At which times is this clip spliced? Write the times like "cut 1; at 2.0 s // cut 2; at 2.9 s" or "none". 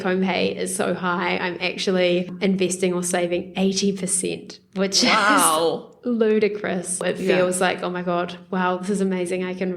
cut 1; at 2.3 s // cut 2; at 7.0 s